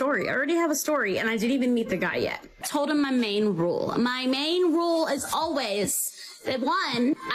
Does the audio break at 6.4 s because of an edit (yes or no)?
no